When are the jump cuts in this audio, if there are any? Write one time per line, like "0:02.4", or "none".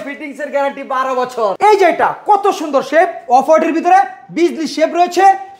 0:01.6